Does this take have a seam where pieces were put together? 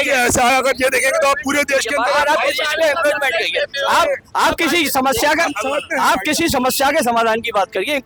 no; 0 cuts

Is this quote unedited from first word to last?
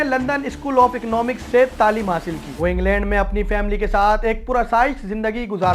no; 1 cut; at 2.4 s

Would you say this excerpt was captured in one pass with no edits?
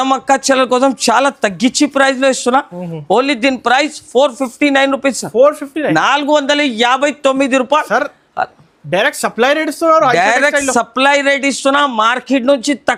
yes; 0 cuts

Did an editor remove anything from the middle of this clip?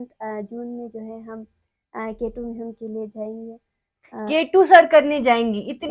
no; 0 cuts

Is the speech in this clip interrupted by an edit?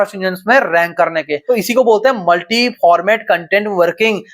yes; 1 cut; at 1.3 s

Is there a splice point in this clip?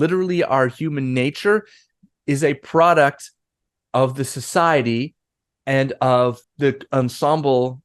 yes; 1 cut; at 6.5 s

